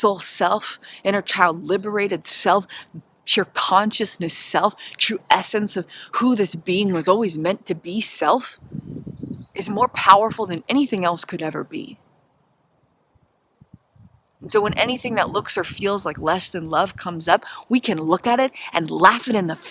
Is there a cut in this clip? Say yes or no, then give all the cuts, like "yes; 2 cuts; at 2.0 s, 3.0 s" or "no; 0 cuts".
no; 0 cuts